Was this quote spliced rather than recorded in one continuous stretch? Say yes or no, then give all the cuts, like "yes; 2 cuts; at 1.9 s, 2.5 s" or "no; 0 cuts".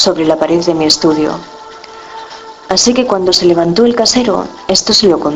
yes; 1 cut; at 4.1 s